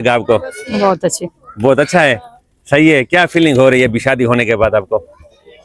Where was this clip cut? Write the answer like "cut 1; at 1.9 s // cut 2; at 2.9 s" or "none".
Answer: none

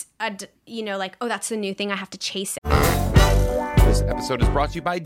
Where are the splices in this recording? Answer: cut 1; at 2.5 s

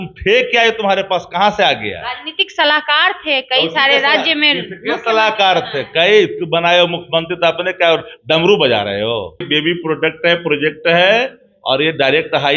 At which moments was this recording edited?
cut 1; at 9.5 s

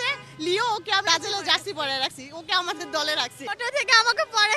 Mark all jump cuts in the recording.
cut 1; at 1.0 s // cut 2; at 3.4 s

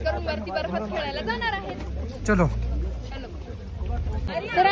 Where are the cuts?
none

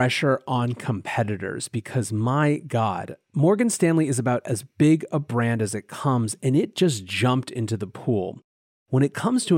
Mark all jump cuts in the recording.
cut 1; at 8.6 s

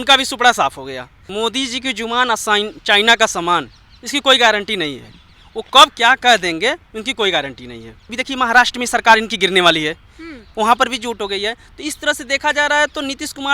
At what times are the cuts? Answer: cut 1; at 1.2 s // cut 2; at 8.2 s

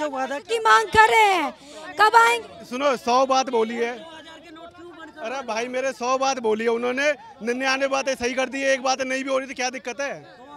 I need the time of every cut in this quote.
none

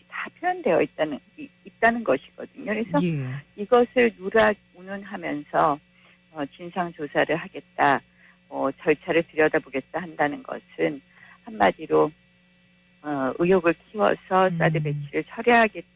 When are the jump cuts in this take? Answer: cut 1; at 2.4 s

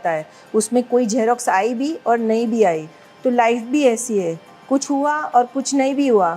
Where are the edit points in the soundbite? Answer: none

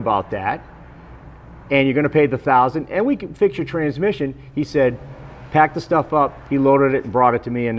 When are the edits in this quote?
none

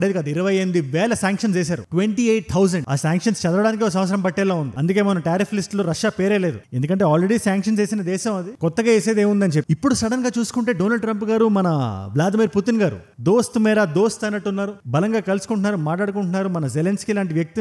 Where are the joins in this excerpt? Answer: none

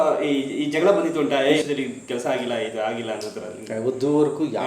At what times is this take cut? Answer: none

